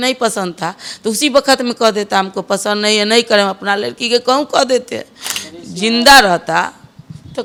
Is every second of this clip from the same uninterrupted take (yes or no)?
yes